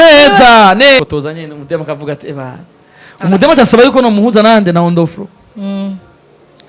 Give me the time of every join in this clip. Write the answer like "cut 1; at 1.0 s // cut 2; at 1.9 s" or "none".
cut 1; at 1.0 s